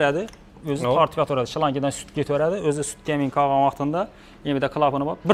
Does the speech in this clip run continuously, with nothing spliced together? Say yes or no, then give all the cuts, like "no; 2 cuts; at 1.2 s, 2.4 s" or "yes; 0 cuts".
yes; 0 cuts